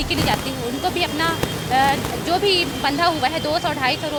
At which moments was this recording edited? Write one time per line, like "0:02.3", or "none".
none